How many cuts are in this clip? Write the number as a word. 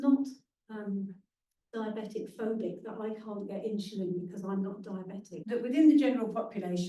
one